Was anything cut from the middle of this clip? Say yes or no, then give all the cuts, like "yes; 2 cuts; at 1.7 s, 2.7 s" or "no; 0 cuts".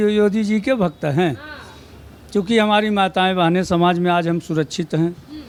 no; 0 cuts